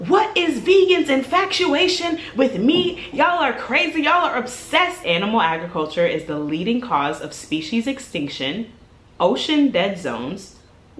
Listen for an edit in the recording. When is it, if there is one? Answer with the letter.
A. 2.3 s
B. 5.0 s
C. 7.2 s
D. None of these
B